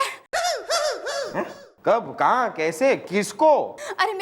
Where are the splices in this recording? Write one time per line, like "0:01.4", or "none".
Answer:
0:01.6